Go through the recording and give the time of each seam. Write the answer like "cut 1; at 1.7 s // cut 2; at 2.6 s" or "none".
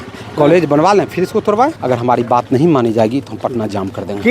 cut 1; at 1.8 s

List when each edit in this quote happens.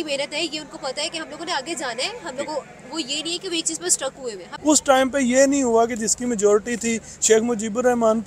cut 1; at 4.5 s

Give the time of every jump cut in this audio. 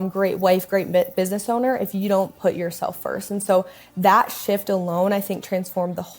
none

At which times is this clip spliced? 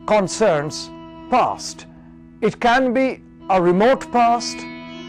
cut 1; at 3.9 s

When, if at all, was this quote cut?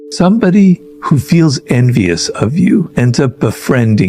cut 1; at 0.9 s // cut 2; at 2.9 s

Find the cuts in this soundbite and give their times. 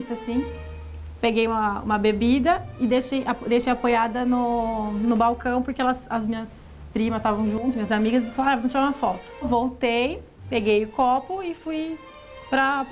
cut 1; at 9.4 s

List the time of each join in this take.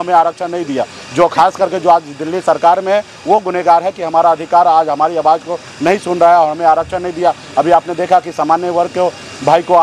none

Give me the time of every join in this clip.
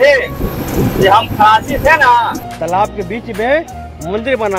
cut 1; at 2.4 s

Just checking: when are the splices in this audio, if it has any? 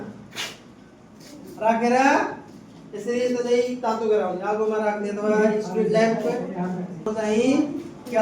cut 1; at 7.0 s

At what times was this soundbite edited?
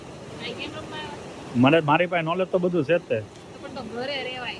none

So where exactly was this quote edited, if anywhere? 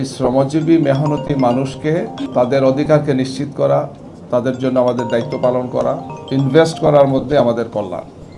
cut 1; at 2.2 s // cut 2; at 6.1 s

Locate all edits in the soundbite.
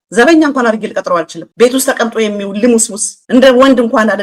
cut 1; at 1.4 s

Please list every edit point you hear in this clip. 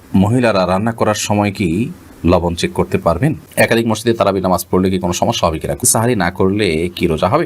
cut 1; at 3.4 s // cut 2; at 5.8 s

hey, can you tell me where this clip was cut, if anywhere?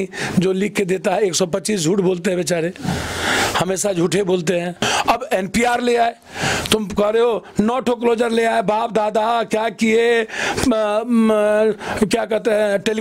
cut 1; at 4.8 s

